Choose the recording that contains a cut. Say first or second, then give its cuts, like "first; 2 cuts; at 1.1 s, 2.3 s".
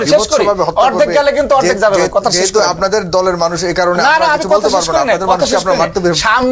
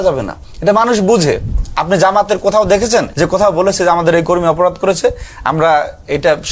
second; 2 cuts; at 1.6 s, 3.1 s